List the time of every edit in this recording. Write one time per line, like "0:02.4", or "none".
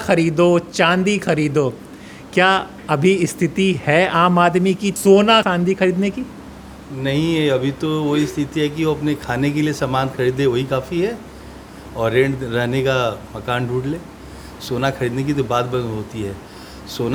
none